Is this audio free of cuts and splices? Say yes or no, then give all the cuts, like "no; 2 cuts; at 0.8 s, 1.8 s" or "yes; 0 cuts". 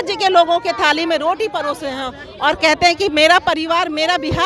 yes; 0 cuts